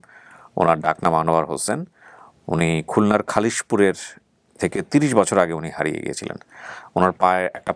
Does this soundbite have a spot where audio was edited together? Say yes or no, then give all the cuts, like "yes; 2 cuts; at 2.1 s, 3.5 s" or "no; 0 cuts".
no; 0 cuts